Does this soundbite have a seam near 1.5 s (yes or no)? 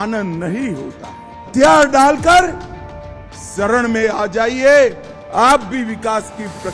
yes